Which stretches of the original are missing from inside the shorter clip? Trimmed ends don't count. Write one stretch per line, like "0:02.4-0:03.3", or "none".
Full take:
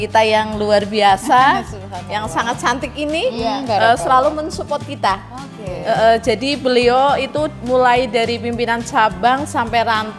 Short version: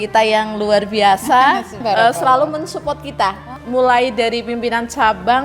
0:01.8-0:03.6
0:05.4-0:07.6